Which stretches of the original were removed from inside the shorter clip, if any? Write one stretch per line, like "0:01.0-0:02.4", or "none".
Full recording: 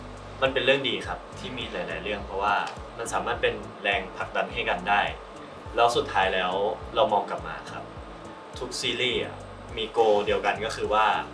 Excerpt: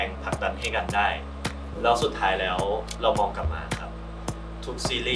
none